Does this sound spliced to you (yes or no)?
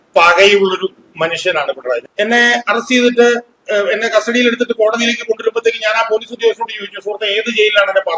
yes